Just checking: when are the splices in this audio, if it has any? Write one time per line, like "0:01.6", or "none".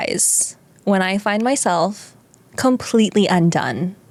none